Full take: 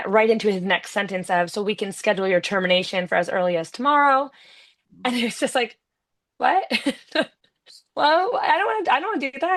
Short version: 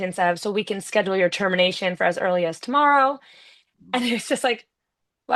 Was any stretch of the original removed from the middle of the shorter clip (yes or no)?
no